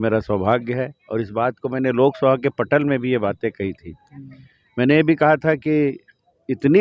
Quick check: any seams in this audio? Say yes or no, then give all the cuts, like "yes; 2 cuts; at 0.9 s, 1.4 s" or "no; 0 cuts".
no; 0 cuts